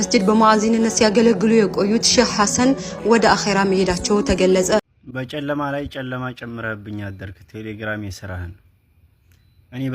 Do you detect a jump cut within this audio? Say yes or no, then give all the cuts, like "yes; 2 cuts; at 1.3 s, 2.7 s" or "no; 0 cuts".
yes; 1 cut; at 4.8 s